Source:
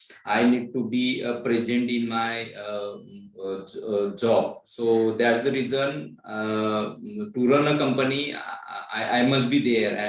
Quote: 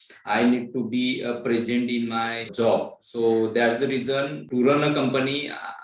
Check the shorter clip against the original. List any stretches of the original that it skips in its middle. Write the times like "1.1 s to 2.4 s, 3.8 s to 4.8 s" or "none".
2.5 s to 4.1 s, 6.0 s to 7.2 s